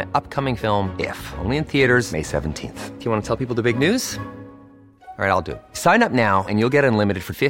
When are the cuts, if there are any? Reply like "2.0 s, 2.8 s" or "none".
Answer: none